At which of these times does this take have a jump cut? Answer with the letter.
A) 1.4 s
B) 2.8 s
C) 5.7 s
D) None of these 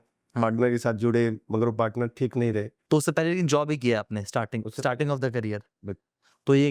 B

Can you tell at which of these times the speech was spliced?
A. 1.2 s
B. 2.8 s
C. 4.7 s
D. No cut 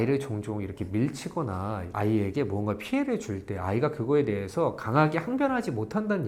D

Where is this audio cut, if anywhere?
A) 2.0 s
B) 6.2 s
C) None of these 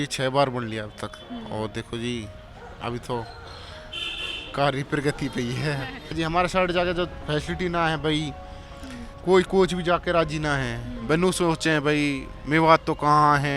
B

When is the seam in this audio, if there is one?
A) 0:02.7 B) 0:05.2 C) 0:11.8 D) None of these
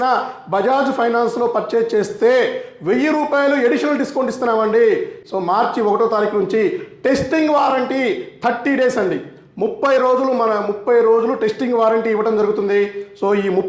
B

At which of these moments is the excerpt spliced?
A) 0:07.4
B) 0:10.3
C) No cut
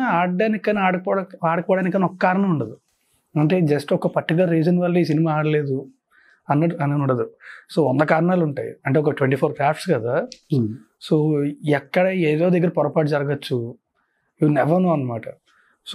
C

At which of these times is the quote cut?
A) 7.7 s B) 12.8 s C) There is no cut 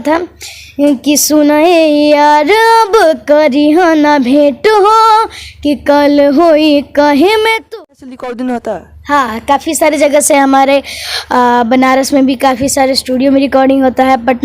A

